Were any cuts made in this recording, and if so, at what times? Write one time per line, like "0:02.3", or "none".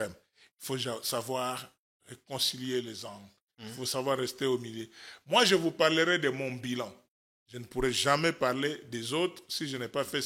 none